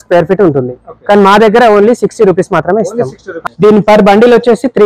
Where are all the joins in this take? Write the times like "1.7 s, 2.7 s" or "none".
3.3 s